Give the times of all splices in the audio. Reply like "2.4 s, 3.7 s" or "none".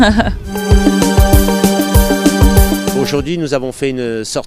1.3 s